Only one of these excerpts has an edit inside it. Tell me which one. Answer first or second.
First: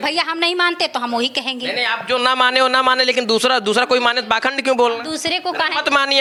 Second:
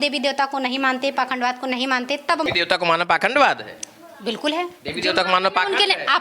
second